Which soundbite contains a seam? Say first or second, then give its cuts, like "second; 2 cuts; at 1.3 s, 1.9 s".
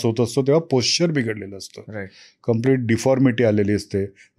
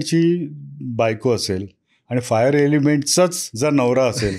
second; 1 cut; at 3.4 s